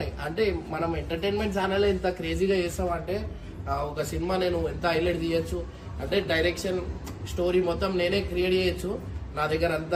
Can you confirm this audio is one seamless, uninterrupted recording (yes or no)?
yes